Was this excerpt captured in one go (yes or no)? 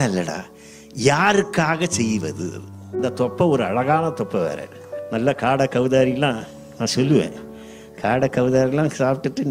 no